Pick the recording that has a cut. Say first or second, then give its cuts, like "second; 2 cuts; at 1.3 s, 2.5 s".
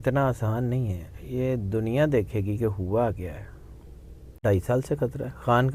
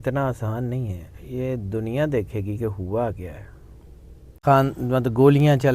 second; 1 cut; at 4.2 s